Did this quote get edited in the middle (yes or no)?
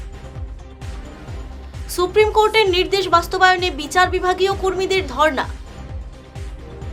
yes